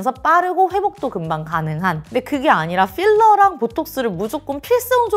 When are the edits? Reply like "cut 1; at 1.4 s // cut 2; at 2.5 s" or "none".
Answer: cut 1; at 2.0 s